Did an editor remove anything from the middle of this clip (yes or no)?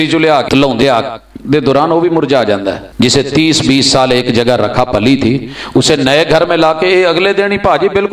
yes